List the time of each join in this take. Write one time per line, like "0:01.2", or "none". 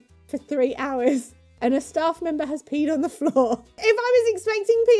none

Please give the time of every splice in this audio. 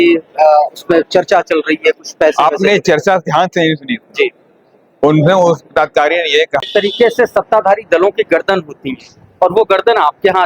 0:06.6

